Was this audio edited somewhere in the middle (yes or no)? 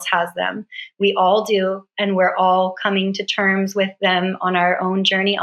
no